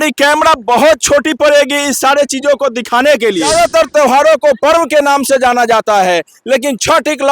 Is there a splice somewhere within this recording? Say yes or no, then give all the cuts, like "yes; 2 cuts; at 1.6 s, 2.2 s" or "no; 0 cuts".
yes; 1 cut; at 3.5 s